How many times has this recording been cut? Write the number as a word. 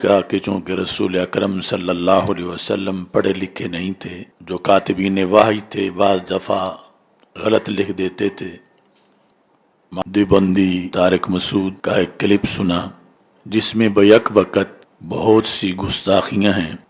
one